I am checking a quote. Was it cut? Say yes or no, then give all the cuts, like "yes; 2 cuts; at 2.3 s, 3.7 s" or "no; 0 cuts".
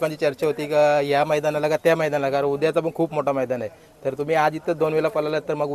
no; 0 cuts